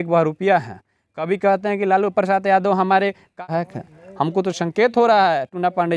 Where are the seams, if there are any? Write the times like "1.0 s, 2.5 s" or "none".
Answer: 3.3 s